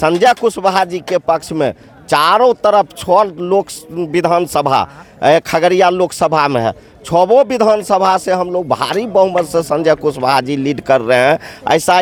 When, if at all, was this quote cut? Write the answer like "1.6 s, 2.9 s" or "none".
none